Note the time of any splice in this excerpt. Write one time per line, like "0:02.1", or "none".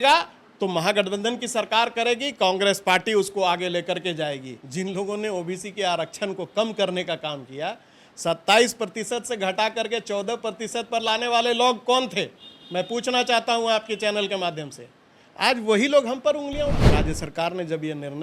0:04.6
0:16.8